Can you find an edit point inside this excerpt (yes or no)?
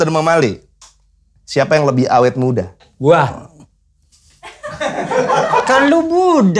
yes